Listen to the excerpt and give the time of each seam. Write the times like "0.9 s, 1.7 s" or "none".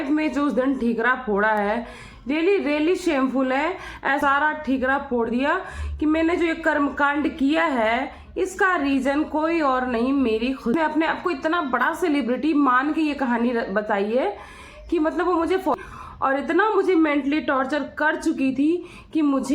4.2 s, 10.7 s, 15.7 s